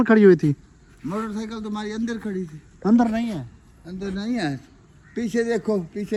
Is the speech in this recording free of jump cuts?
yes; 0 cuts

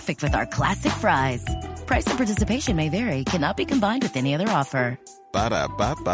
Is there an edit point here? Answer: no; 0 cuts

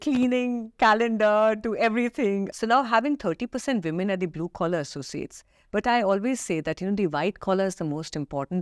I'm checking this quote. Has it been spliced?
yes; 1 cut; at 2.5 s

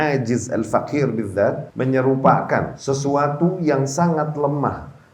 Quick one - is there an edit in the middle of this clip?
yes; 2 cuts; at 1.7 s, 2.7 s

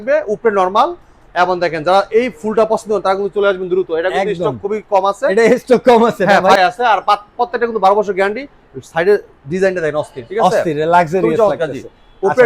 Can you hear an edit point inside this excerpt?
yes; 1 cut; at 6.6 s

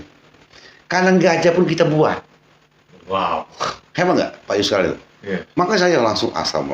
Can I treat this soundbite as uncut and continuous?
yes; 0 cuts

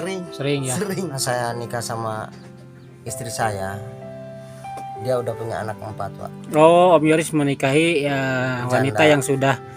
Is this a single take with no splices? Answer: no; 1 cut; at 1.2 s

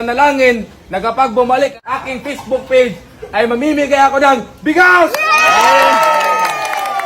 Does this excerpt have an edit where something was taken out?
yes; 1 cut; at 1.8 s

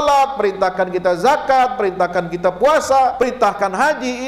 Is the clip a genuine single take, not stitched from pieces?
no; 1 cut; at 3.3 s

